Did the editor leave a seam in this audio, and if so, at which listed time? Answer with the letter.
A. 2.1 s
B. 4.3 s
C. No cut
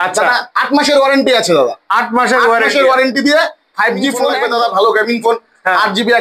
B